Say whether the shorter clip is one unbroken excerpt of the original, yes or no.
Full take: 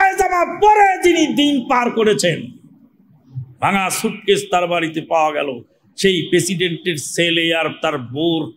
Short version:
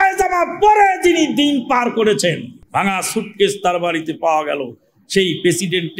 no